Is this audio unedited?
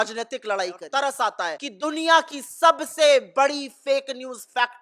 no; 2 cuts; at 0.8 s, 1.6 s

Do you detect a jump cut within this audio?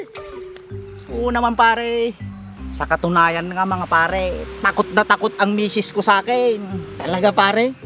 no; 0 cuts

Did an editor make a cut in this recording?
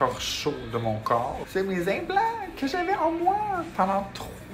yes; 1 cut; at 1.4 s

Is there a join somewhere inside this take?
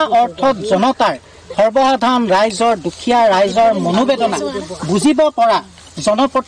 no; 0 cuts

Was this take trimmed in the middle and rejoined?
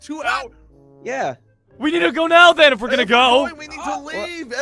no; 0 cuts

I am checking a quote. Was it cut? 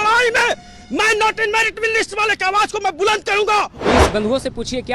yes; 1 cut; at 3.7 s

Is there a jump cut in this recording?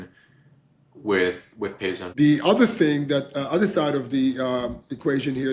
yes; 1 cut; at 2.0 s

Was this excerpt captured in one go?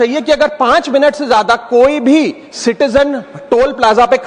yes; 0 cuts

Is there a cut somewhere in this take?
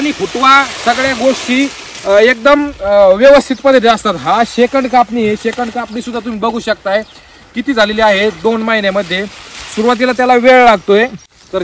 no; 0 cuts

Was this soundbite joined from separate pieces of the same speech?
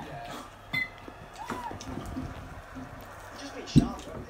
no; 0 cuts

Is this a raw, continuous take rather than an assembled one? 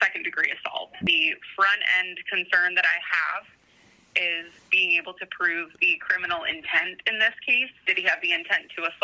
no; 2 cuts; at 1.1 s, 7.8 s

